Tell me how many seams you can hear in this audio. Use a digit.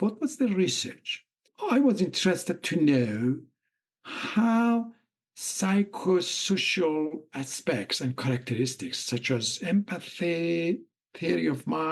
1